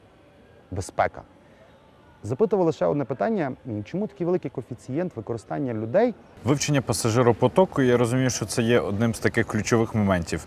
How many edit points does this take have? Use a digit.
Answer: 1